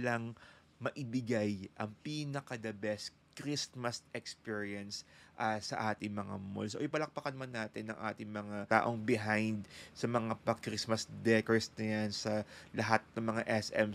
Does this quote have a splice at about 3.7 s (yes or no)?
no